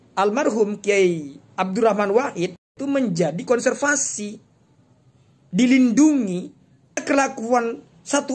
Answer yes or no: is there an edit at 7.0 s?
yes